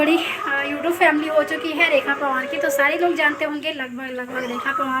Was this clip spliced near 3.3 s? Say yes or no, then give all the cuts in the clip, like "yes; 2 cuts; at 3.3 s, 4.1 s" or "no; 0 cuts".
no; 0 cuts